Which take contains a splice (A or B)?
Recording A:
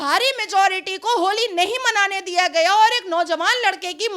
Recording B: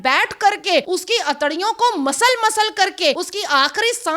B